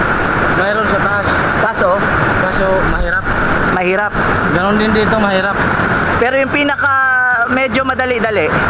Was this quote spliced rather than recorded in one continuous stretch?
no; 0 cuts

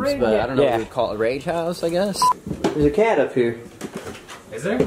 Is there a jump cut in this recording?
yes; 1 cut; at 2.2 s

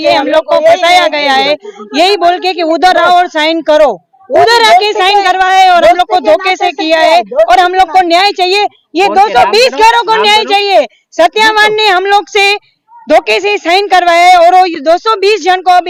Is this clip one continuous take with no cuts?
yes; 0 cuts

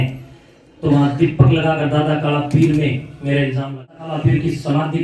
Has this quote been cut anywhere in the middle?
yes; 1 cut; at 3.9 s

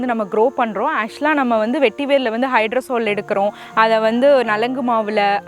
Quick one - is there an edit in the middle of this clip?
no; 0 cuts

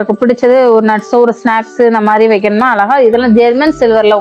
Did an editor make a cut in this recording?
no; 0 cuts

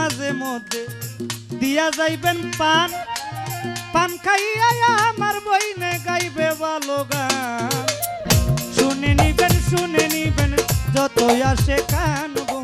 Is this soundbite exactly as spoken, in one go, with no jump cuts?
yes; 0 cuts

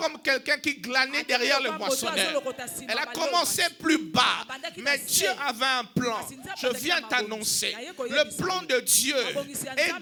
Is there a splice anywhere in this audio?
no; 0 cuts

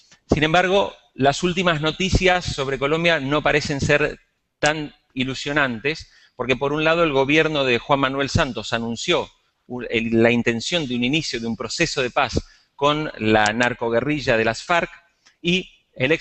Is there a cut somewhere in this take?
no; 0 cuts

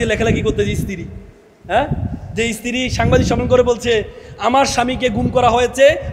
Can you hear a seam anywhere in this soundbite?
no; 0 cuts

